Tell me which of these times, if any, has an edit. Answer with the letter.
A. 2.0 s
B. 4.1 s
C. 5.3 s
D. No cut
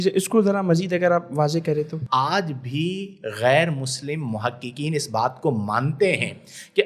A